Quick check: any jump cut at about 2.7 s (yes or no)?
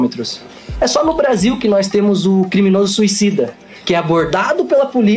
no